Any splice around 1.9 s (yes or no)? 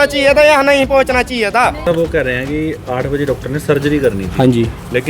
yes